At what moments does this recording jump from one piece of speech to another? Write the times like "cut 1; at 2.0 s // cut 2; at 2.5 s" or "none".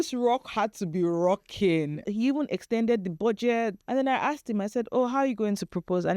cut 1; at 2.1 s // cut 2; at 3.8 s